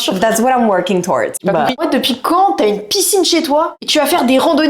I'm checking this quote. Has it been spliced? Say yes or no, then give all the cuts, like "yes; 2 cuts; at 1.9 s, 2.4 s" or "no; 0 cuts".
yes; 2 cuts; at 1.4 s, 3.8 s